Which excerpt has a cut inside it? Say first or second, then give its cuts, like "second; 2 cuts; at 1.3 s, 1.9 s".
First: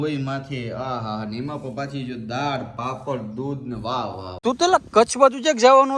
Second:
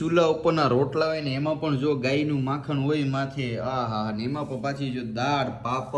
first; 1 cut; at 4.3 s